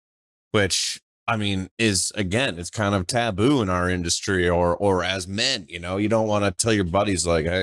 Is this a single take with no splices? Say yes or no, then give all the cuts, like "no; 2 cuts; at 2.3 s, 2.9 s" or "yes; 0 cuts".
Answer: yes; 0 cuts